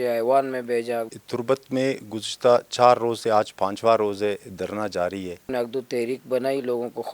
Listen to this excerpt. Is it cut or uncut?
cut